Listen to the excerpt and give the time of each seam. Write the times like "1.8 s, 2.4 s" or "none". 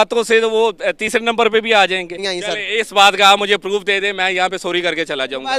2.3 s